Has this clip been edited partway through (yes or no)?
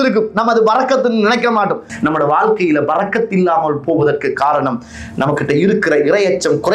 yes